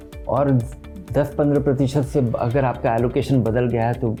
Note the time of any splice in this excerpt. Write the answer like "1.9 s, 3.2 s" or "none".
none